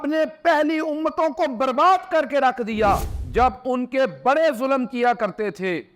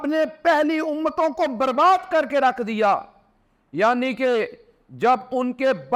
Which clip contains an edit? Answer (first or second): first